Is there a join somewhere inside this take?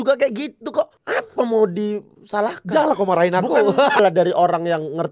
yes; 1 cut; at 4.0 s

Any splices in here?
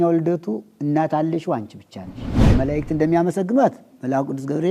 yes; 1 cut; at 2.5 s

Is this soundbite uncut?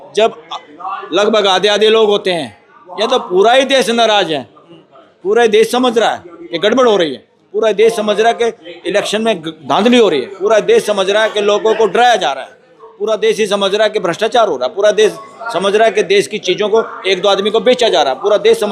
yes; 0 cuts

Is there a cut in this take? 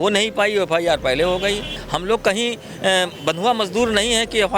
yes; 1 cut; at 1.8 s

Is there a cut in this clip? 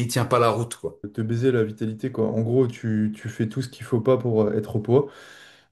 yes; 1 cut; at 1.1 s

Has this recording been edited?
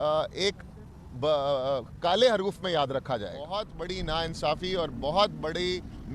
yes; 1 cut; at 3.7 s

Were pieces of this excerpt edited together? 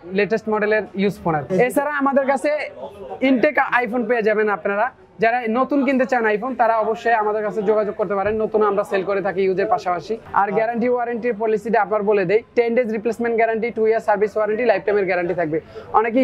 yes; 2 cuts; at 1.5 s, 10.2 s

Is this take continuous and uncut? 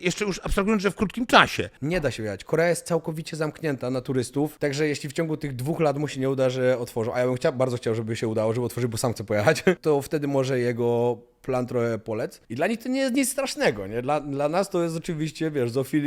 no; 4 cuts; at 1.8 s, 4.5 s, 9.8 s, 12.4 s

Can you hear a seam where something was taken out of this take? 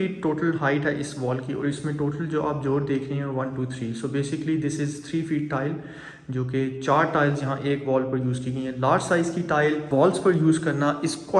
yes; 1 cut; at 9.9 s

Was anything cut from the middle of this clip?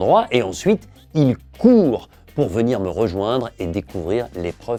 no; 0 cuts

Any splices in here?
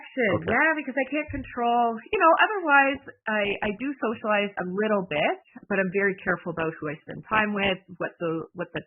yes; 1 cut; at 5.5 s

